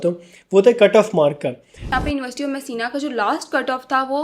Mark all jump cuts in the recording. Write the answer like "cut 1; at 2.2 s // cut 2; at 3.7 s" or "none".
cut 1; at 1.9 s